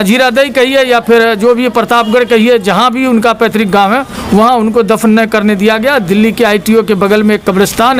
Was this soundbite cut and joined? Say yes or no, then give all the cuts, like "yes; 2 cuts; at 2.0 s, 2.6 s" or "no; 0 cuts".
no; 0 cuts